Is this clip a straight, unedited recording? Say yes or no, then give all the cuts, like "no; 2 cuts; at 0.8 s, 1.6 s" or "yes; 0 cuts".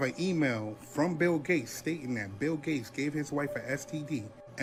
yes; 0 cuts